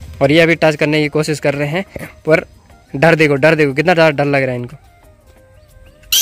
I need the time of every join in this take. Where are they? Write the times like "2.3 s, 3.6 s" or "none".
none